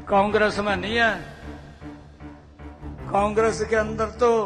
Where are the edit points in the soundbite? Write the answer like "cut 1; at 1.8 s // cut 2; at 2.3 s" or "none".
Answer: cut 1; at 1.4 s // cut 2; at 3.0 s